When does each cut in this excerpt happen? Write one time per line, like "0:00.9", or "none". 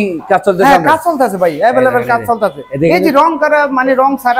none